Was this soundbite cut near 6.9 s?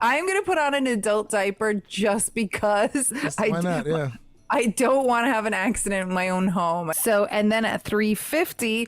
yes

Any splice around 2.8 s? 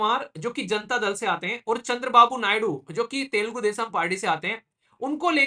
no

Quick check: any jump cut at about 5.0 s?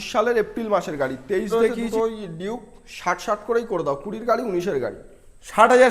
no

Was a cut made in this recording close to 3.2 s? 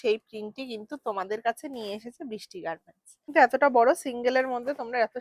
yes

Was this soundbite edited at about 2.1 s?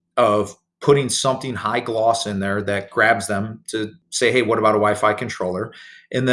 no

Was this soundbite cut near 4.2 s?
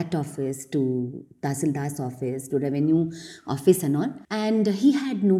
yes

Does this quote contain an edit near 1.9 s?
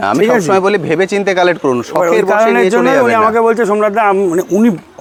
no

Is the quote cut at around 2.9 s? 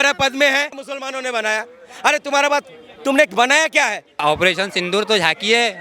no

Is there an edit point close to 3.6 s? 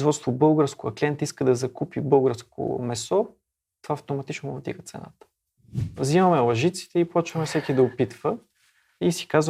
no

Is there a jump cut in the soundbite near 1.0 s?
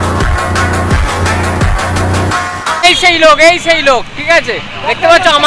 no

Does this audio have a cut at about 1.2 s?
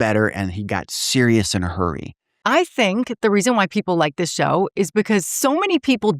no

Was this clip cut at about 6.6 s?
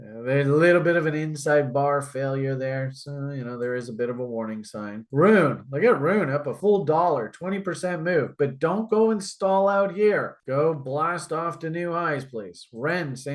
yes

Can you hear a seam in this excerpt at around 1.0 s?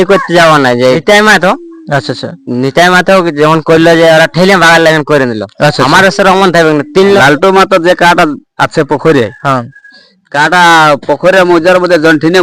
yes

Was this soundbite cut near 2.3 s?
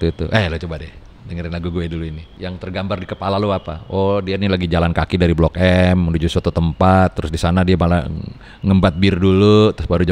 yes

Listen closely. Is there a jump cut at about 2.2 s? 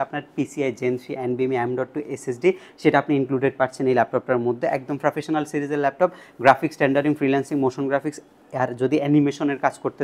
no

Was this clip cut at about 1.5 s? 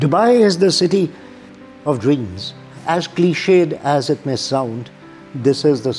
yes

